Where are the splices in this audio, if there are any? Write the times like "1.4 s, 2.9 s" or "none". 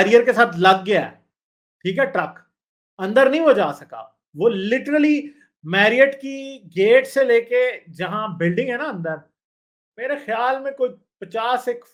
none